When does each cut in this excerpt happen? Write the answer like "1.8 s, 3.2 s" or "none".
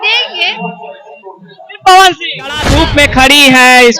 2.7 s